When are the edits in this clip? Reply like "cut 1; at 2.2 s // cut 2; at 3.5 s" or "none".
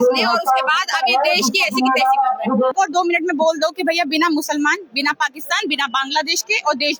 cut 1; at 2.7 s